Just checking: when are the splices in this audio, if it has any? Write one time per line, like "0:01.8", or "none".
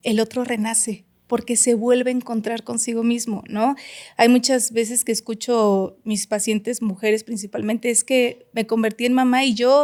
none